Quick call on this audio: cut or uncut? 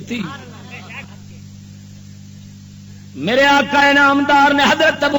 cut